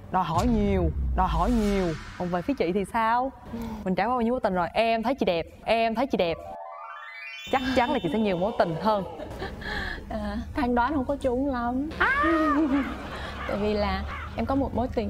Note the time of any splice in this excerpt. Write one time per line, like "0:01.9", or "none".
0:02.0